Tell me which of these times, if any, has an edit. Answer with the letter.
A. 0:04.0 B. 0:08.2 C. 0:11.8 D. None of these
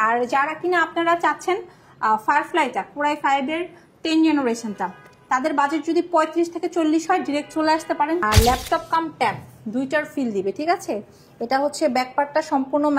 B